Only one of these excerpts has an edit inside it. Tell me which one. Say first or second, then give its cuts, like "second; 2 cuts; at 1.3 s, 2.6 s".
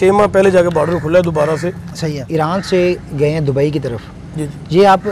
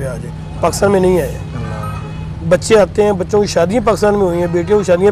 first; 1 cut; at 2.2 s